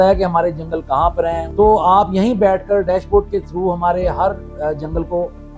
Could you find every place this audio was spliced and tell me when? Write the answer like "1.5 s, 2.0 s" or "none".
1.4 s